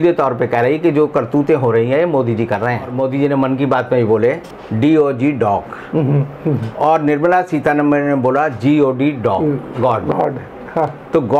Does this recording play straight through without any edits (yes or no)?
no